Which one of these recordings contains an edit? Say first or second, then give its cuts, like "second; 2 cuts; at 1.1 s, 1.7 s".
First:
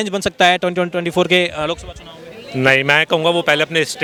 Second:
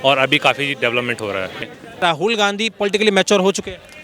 second; 1 cut; at 2.0 s